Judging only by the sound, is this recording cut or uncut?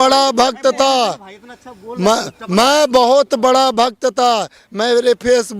uncut